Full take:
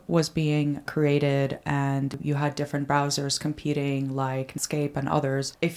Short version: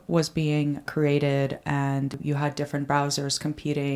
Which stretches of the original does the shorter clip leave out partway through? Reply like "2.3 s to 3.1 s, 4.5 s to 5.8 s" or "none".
none